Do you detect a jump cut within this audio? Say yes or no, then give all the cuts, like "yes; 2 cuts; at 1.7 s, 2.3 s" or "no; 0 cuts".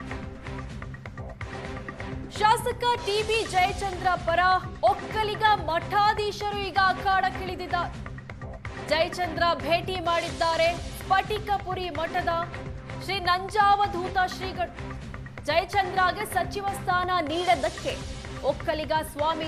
yes; 1 cut; at 0.9 s